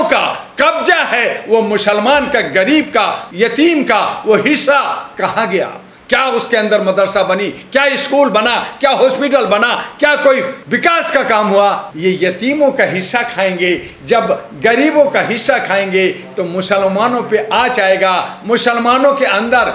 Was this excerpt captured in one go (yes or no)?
yes